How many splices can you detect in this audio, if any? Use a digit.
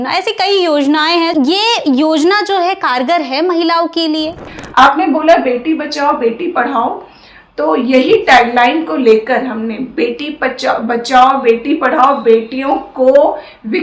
2